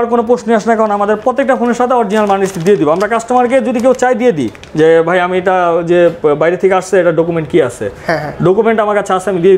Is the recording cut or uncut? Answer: uncut